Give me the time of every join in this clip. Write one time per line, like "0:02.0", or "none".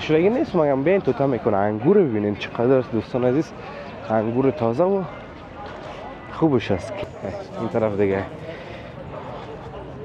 0:07.0